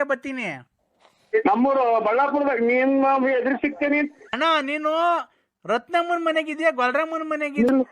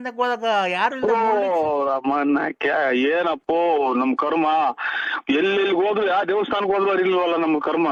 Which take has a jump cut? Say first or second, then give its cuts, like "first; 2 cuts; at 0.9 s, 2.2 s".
first; 1 cut; at 4.2 s